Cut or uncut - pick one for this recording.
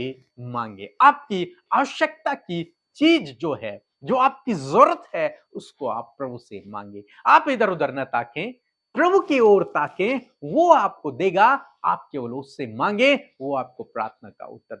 uncut